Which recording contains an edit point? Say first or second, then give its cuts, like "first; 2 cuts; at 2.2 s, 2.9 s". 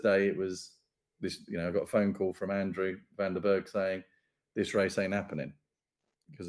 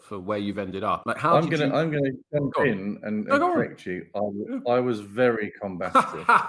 second; 1 cut; at 1.0 s